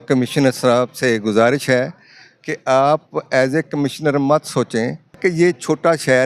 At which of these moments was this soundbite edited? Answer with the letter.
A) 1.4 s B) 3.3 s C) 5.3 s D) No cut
C